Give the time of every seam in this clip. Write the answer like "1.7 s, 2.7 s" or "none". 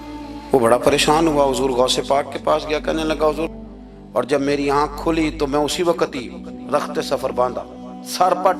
3.5 s